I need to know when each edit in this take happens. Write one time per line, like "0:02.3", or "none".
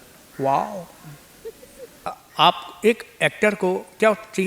0:02.2